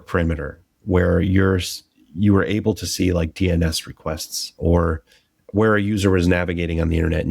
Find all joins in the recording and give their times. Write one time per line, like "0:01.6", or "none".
0:04.5